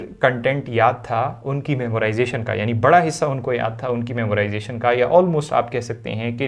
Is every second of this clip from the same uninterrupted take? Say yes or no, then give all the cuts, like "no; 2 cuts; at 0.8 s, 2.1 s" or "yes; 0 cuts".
yes; 0 cuts